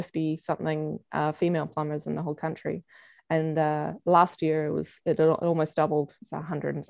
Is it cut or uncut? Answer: uncut